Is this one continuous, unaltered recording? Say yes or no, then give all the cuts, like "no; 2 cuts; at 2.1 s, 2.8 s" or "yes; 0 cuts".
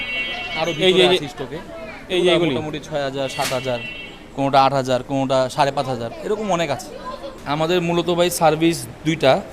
no; 1 cut; at 7.3 s